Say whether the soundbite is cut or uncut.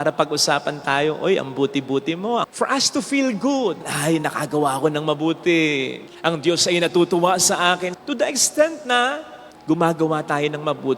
cut